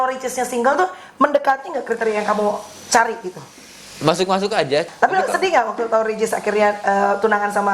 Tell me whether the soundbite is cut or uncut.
cut